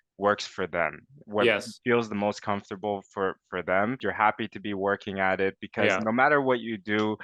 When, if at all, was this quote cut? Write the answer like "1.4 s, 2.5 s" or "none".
4.0 s